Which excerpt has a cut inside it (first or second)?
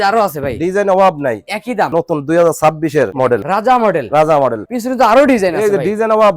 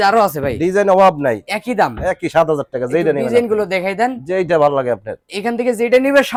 first